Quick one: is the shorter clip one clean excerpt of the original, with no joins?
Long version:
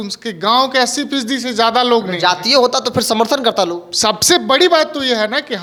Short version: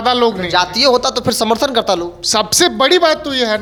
yes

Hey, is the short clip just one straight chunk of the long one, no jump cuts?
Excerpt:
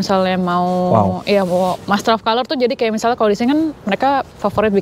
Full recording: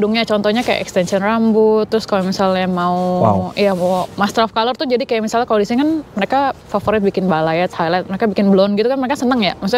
yes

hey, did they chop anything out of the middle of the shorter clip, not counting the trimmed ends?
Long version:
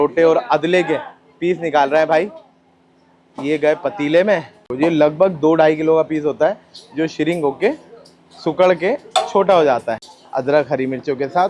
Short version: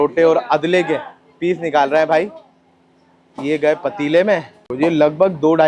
no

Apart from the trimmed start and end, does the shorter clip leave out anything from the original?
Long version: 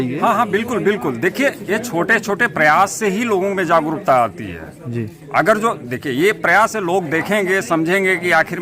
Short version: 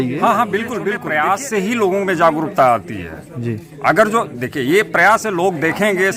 yes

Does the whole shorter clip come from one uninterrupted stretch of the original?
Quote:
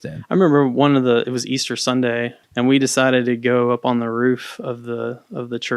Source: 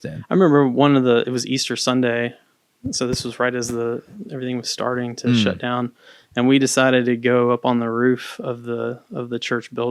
no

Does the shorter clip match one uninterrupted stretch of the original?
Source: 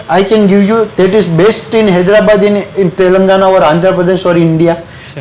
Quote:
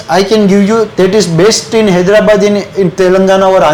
yes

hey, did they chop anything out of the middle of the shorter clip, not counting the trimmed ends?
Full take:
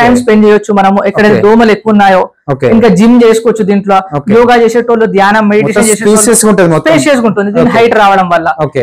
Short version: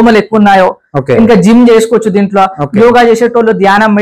no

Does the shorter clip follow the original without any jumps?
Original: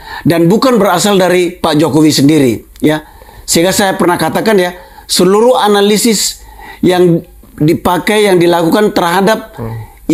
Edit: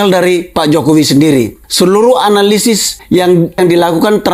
no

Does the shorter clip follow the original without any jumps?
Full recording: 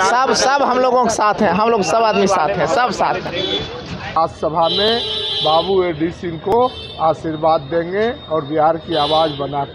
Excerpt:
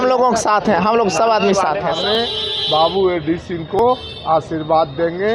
no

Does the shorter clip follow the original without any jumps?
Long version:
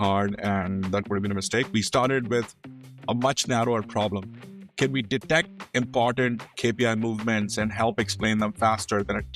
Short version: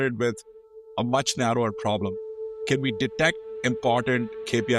yes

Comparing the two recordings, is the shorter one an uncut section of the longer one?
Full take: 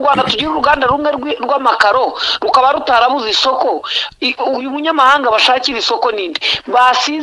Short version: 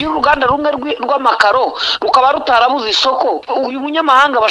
no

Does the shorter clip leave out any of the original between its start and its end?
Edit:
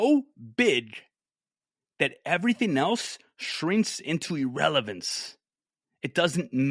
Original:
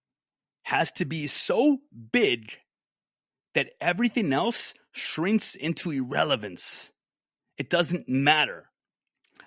no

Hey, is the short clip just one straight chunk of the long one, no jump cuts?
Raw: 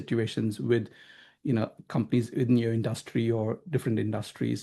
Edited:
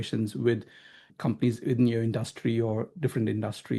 no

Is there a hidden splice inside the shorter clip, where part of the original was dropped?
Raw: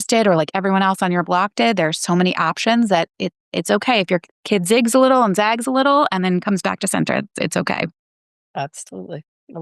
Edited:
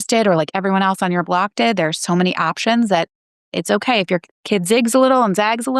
no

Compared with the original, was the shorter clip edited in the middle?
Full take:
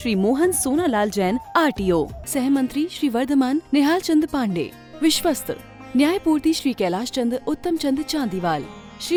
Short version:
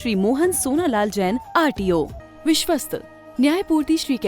yes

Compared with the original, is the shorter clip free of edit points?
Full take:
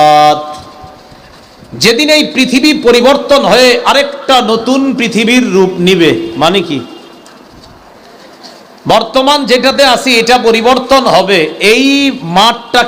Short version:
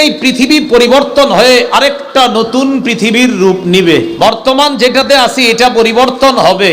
no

